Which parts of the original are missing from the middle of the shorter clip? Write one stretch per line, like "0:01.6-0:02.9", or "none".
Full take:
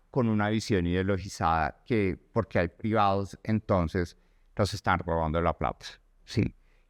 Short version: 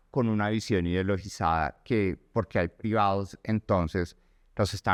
none